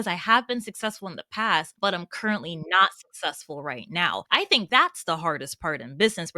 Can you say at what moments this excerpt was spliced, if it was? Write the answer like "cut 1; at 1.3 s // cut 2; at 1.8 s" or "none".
cut 1; at 1.7 s // cut 2; at 4.5 s